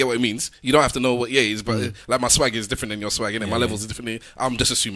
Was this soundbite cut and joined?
no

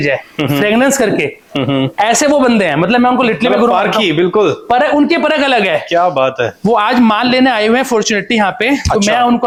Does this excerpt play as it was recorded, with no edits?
yes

